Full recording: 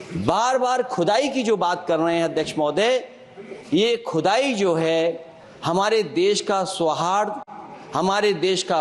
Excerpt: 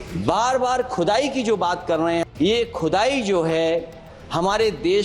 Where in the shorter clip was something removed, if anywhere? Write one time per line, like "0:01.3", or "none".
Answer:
0:02.3